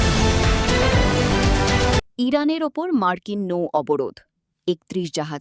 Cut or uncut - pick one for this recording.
uncut